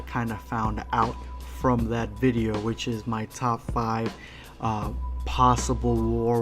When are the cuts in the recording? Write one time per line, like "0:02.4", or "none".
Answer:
0:01.9